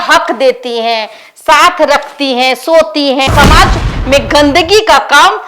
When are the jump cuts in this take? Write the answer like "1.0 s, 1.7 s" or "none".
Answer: 3.3 s